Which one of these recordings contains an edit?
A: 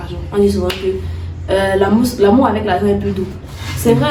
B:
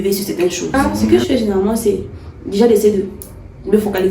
B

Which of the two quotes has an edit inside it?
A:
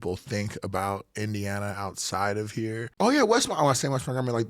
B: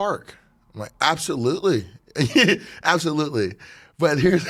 A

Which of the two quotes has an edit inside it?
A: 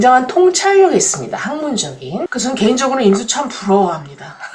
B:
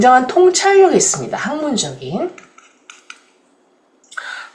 A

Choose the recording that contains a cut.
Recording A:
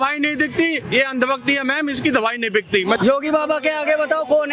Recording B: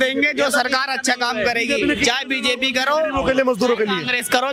A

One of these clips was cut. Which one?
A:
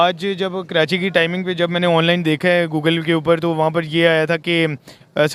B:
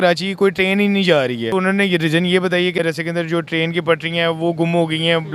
B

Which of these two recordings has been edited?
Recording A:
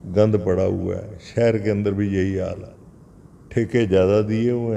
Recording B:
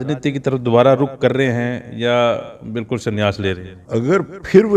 B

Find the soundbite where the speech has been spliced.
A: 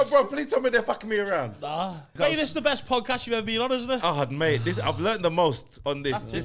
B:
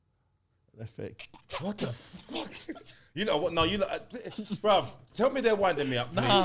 A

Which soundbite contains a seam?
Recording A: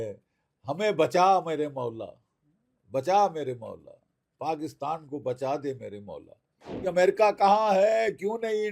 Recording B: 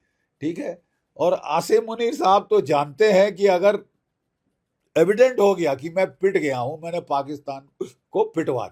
A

